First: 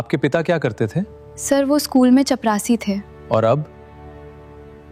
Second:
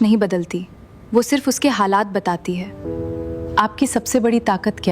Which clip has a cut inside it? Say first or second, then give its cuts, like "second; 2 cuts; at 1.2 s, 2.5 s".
second; 1 cut; at 2.8 s